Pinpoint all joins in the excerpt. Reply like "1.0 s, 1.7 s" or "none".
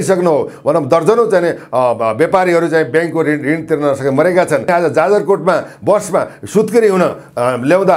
4.7 s

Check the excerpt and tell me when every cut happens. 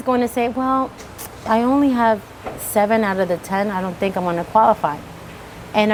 none

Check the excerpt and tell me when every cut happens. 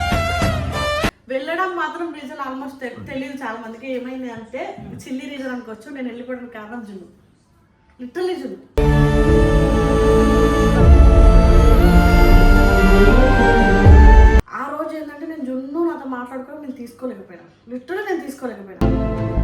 1.2 s, 14.6 s

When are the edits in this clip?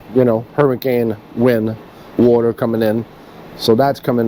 none

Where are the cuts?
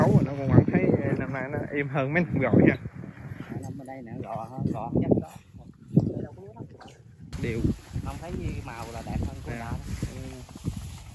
7.3 s

